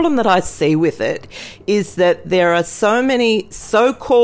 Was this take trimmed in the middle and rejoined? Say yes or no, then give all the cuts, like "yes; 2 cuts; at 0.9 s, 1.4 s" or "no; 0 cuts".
no; 0 cuts